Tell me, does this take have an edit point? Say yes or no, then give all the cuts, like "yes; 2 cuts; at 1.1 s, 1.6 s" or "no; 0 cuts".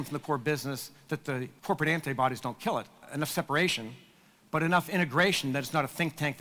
yes; 2 cuts; at 1.5 s, 3.0 s